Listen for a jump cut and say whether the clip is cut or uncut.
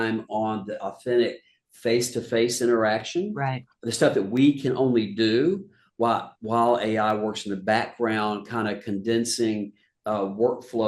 uncut